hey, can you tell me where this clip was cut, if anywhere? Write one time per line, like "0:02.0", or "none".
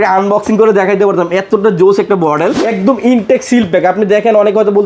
0:02.6